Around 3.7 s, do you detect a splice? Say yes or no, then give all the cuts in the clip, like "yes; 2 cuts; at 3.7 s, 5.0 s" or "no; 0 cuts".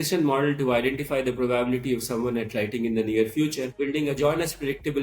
yes; 1 cut; at 3.7 s